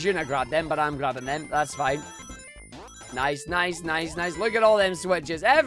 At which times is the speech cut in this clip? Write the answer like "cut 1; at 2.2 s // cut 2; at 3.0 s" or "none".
none